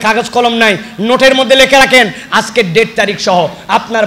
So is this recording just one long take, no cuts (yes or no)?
yes